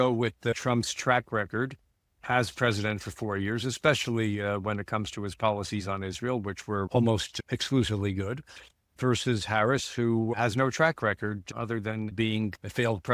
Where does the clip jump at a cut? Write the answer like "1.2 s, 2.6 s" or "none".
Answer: none